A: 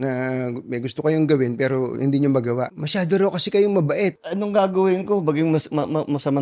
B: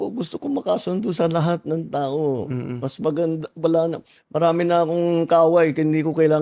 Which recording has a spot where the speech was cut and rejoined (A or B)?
A